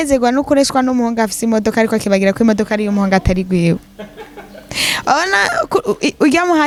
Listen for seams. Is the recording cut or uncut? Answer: uncut